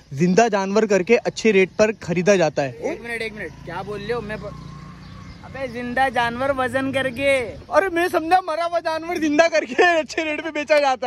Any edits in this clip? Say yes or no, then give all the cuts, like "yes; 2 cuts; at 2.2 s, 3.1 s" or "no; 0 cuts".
no; 0 cuts